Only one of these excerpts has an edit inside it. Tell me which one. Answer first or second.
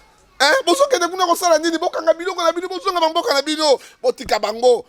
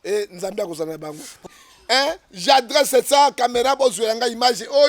second